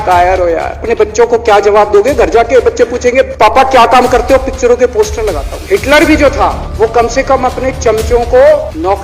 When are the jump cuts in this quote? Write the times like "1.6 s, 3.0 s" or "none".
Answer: 0.8 s, 5.6 s